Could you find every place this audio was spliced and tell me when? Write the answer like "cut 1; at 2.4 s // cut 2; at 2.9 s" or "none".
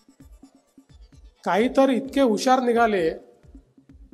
cut 1; at 1.4 s